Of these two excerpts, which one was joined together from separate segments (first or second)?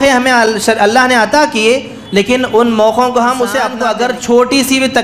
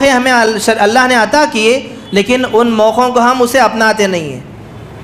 first